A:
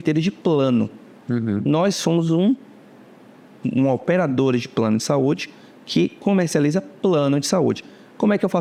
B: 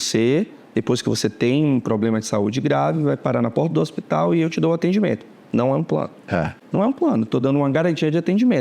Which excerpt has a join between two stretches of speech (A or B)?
B